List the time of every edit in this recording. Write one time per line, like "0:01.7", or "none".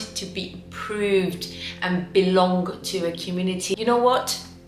0:03.8